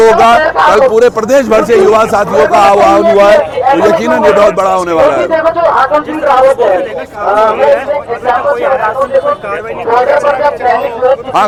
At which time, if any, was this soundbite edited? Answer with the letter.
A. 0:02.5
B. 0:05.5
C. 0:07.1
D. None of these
D